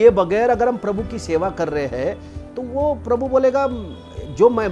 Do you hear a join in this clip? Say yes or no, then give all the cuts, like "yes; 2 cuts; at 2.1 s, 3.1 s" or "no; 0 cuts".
no; 0 cuts